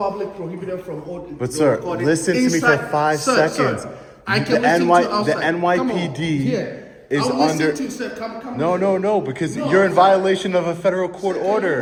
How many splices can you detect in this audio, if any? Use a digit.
0